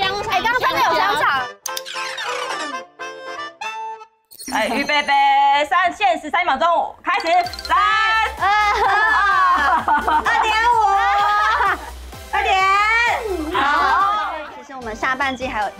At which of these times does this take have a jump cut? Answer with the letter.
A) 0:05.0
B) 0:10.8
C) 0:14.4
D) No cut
C